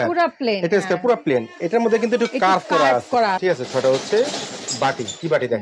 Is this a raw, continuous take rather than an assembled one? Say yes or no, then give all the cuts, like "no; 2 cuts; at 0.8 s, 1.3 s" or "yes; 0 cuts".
no; 1 cut; at 3.4 s